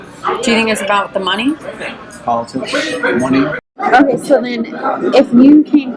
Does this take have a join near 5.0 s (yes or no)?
no